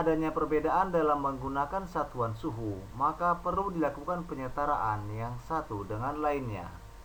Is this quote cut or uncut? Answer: uncut